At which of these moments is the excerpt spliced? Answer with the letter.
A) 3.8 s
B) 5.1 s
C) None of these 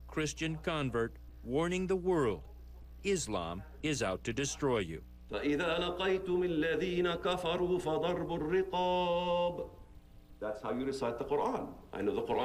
C